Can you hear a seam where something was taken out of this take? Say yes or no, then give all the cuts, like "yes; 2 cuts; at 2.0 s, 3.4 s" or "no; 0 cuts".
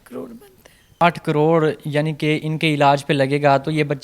yes; 1 cut; at 1.0 s